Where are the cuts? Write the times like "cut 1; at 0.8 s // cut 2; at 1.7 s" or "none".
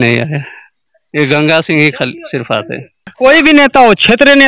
cut 1; at 3.1 s